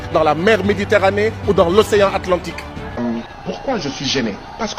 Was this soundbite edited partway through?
yes; 1 cut; at 2.9 s

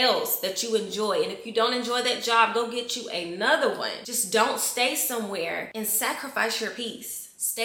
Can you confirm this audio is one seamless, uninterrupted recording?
yes; 0 cuts

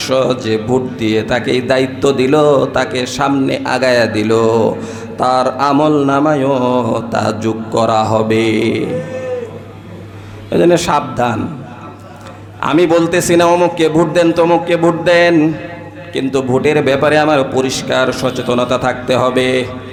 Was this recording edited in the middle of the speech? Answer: no; 0 cuts

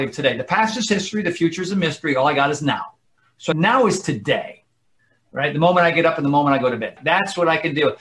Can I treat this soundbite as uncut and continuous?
no; 2 cuts; at 3.5 s, 6.9 s

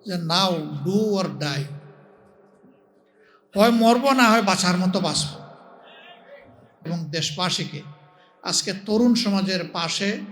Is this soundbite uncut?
no; 1 cut; at 6.9 s

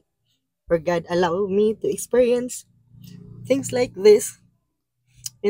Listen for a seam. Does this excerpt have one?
no; 0 cuts

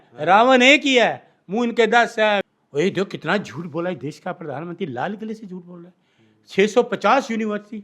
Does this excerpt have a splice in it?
yes; 1 cut; at 2.4 s

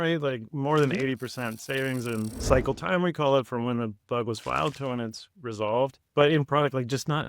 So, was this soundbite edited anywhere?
yes; 1 cut; at 6.0 s

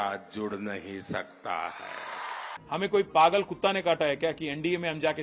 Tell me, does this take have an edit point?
yes; 1 cut; at 2.5 s

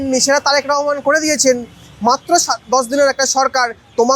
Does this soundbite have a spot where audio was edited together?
no; 0 cuts

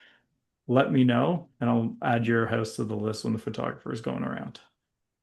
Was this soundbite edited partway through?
no; 0 cuts

